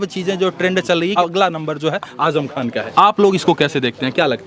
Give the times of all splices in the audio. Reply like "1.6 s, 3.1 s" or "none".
1.1 s, 2.8 s

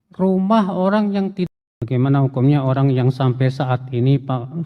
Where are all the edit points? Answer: 1.5 s

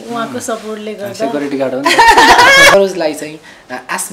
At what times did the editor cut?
2.7 s

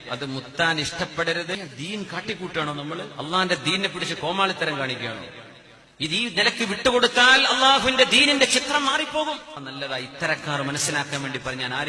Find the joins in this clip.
1.5 s, 9.7 s

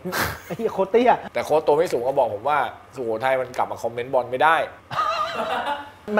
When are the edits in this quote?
1.2 s, 4.8 s

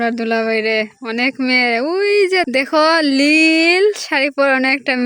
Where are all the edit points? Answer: none

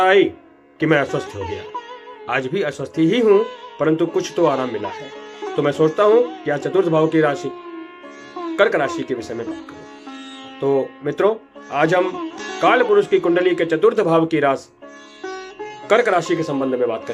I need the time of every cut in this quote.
none

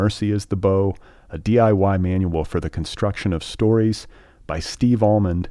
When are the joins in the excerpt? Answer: none

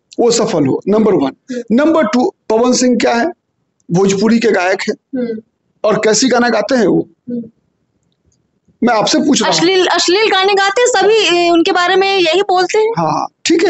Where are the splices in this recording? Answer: none

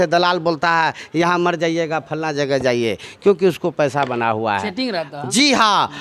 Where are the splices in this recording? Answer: none

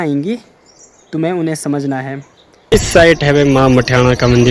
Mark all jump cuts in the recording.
2.7 s

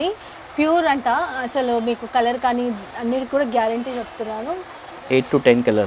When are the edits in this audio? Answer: 4.9 s

